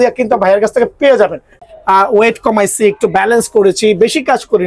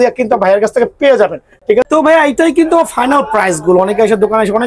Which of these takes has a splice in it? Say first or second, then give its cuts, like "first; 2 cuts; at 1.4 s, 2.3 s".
first; 1 cut; at 1.6 s